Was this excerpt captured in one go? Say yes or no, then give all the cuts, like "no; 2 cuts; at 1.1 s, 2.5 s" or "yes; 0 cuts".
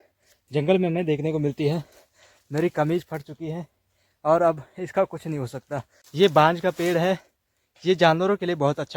no; 1 cut; at 6.0 s